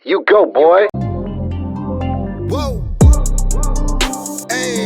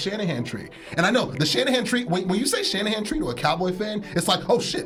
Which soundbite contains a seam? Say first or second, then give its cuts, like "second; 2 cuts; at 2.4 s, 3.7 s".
first; 1 cut; at 0.9 s